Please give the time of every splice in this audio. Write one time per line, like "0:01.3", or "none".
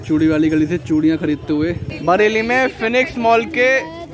0:01.9